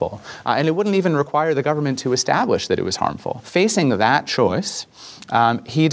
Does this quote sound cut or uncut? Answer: cut